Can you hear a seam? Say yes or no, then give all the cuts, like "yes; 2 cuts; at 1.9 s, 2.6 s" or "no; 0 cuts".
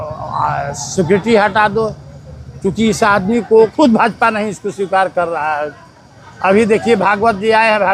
yes; 1 cut; at 3.7 s